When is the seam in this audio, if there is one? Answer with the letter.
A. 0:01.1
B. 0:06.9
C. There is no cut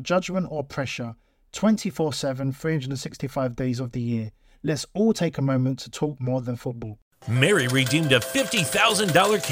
B